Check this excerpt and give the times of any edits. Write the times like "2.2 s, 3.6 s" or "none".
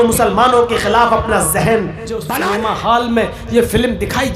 2.3 s